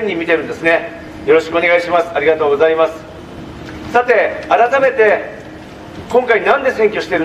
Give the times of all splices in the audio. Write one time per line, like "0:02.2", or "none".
none